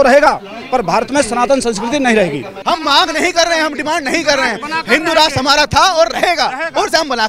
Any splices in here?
yes; 1 cut; at 2.5 s

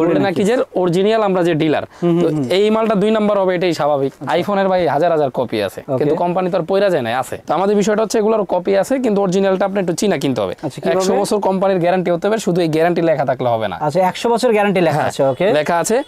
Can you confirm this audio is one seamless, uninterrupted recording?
yes; 0 cuts

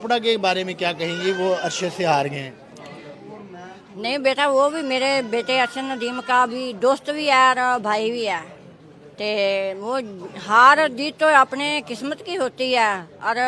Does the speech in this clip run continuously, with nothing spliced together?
yes; 0 cuts

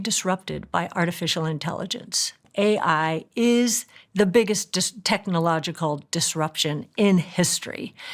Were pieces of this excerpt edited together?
yes; 1 cut; at 2.4 s

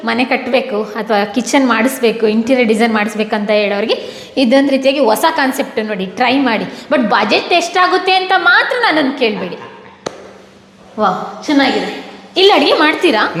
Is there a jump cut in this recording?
no; 0 cuts

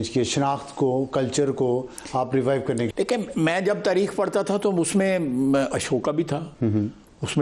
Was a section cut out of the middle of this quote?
yes; 2 cuts; at 2.9 s, 6.5 s

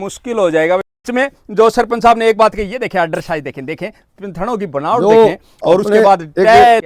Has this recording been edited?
yes; 1 cut; at 1.0 s

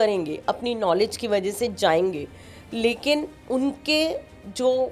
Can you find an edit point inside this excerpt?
yes; 1 cut; at 3.4 s

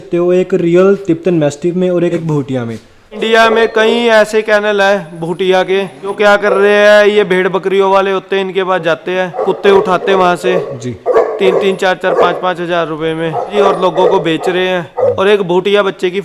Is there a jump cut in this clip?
yes; 6 cuts; at 2.1 s, 3.2 s, 6.1 s, 9.4 s, 13.5 s, 15.1 s

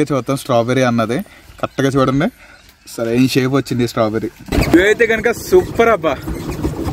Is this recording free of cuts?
no; 1 cut; at 4.5 s

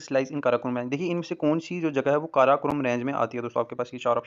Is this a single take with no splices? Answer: yes; 0 cuts

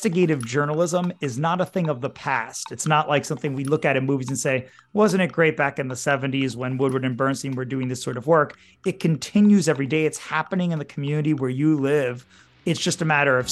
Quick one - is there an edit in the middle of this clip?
yes; 1 cut; at 12.4 s

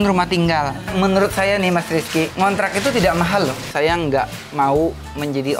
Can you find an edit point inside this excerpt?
yes; 3 cuts; at 0.9 s, 2.3 s, 3.7 s

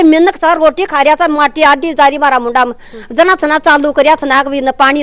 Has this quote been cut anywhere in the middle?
no; 0 cuts

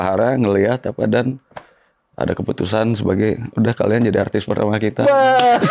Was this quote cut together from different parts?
no; 0 cuts

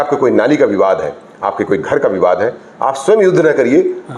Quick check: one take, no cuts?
yes; 0 cuts

